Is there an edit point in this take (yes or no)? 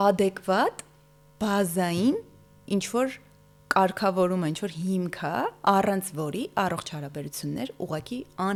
no